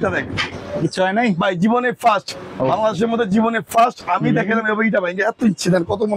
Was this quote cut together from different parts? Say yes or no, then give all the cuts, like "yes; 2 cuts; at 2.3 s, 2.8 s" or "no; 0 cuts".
no; 0 cuts